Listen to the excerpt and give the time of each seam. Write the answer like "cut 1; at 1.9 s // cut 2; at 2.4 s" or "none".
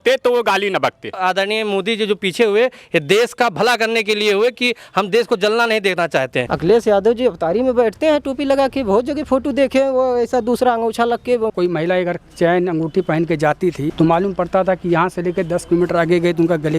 cut 1; at 1.2 s // cut 2; at 6.4 s // cut 3; at 11.5 s // cut 4; at 13.9 s